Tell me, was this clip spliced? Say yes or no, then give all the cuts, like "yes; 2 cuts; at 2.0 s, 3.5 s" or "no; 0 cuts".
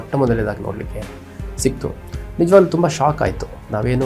no; 0 cuts